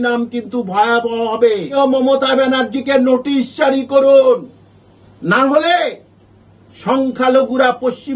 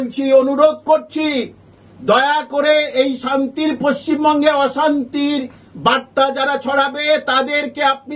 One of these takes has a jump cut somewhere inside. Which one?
first; 1 cut; at 1.7 s

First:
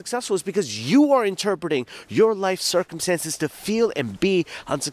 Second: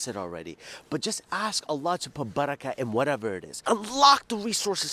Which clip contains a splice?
second; 1 cut; at 3.5 s

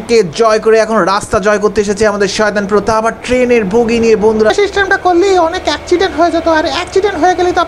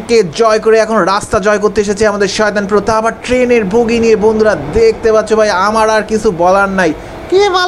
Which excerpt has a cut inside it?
first; 1 cut; at 4.5 s

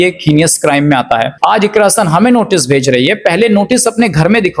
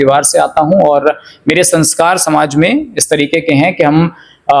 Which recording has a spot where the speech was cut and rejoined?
first; 1 cut; at 1.3 s

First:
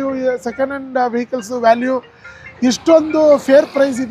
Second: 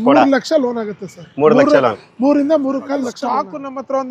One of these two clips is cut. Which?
second; 1 cut; at 3.2 s

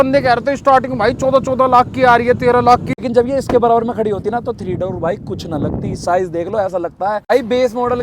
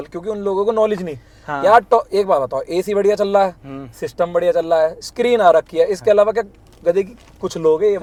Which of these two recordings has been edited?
first; 2 cuts; at 2.9 s, 7.3 s

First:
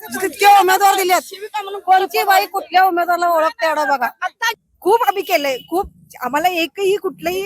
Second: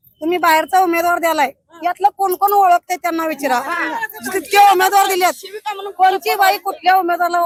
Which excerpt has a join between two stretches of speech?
first; 1 cut; at 4.5 s

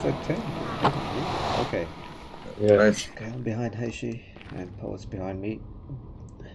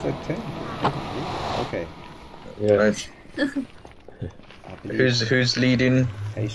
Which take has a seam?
first; 1 cut; at 3.2 s

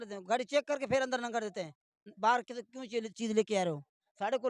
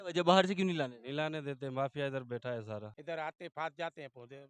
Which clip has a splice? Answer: second; 1 cut; at 2.9 s

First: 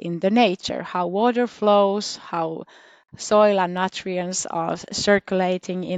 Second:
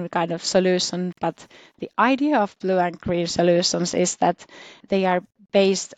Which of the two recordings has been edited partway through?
second; 1 cut; at 4.8 s

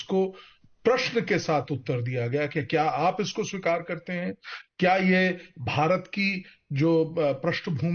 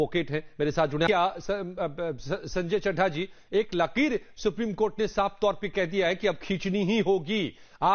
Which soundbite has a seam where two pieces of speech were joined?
second; 1 cut; at 1.1 s

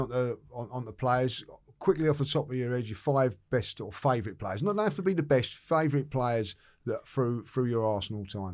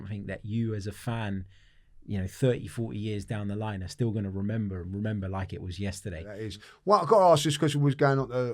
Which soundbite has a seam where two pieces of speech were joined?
second; 1 cut; at 6.3 s

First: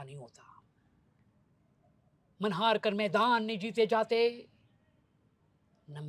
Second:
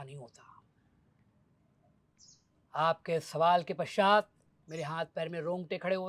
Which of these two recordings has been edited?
second; 1 cut; at 2.0 s

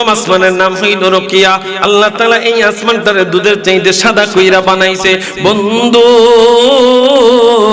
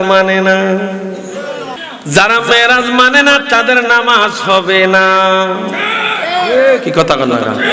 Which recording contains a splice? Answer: second; 1 cut; at 1.8 s

